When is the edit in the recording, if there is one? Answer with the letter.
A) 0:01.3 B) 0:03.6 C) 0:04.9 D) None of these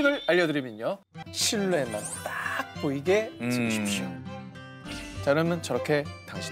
A